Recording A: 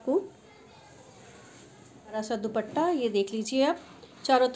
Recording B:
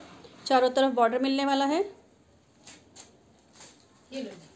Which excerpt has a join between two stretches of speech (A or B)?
A